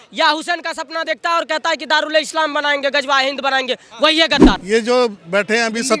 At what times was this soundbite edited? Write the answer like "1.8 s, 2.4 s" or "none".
4.6 s